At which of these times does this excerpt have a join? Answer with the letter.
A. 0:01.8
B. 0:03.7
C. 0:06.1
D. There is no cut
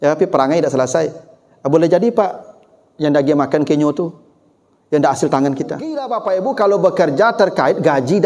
C